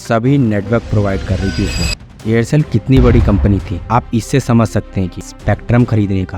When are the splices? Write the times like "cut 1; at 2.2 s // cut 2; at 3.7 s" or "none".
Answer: cut 1; at 1.9 s // cut 2; at 5.3 s